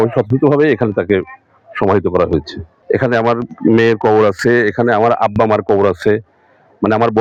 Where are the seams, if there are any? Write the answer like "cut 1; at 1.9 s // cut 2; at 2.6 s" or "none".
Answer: none